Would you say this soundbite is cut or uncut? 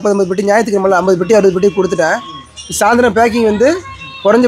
uncut